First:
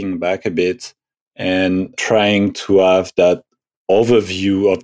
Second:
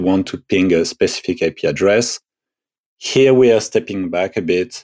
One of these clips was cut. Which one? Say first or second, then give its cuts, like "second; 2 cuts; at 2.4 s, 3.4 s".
first; 1 cut; at 2.0 s